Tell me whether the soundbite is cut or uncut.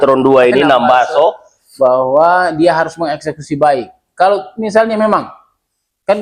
uncut